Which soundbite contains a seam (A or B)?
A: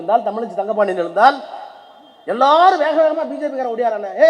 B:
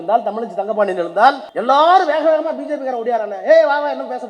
B